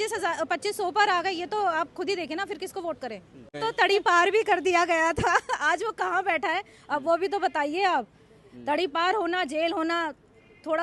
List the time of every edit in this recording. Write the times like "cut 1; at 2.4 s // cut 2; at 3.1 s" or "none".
cut 1; at 3.5 s